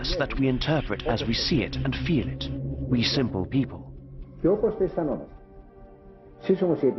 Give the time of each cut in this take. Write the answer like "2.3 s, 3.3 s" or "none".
none